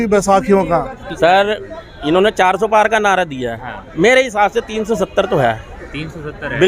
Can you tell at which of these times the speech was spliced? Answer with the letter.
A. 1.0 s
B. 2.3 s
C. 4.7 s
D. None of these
A